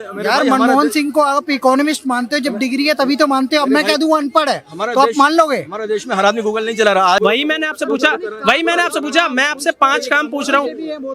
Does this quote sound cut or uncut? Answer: cut